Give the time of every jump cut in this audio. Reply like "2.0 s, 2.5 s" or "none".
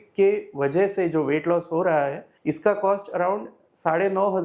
2.3 s